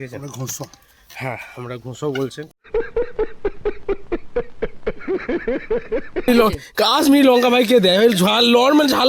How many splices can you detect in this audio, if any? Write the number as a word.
one